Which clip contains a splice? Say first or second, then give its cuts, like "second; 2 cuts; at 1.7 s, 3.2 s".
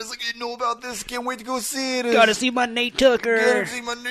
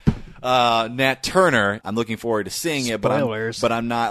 second; 1 cut; at 1.8 s